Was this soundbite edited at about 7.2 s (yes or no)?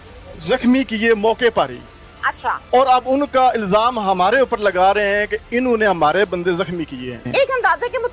yes